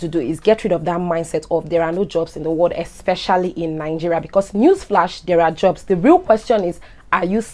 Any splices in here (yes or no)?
no